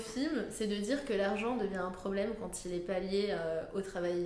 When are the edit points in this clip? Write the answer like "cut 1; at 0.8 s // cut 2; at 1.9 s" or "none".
none